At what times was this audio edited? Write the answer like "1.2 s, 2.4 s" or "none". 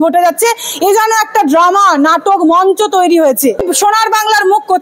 3.6 s